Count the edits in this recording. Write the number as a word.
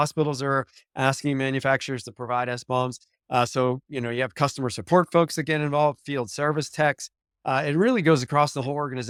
zero